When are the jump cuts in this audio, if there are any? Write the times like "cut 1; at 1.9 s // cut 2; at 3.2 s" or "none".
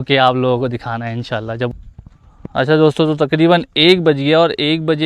cut 1; at 1.7 s